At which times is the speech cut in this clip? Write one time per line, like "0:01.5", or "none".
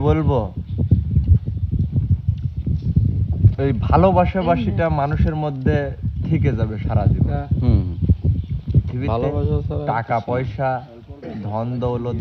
none